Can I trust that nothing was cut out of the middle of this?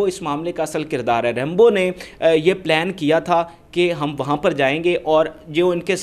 yes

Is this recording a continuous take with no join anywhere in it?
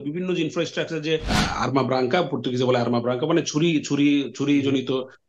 no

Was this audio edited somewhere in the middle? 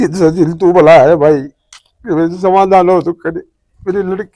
no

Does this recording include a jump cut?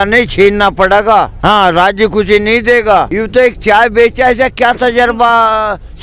yes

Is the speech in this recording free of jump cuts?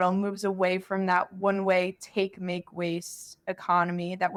yes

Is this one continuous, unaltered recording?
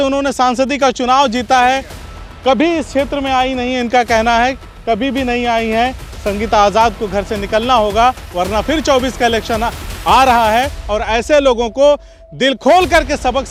yes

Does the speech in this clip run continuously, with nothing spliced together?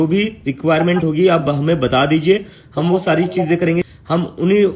no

